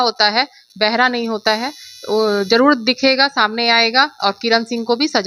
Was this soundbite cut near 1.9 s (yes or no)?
no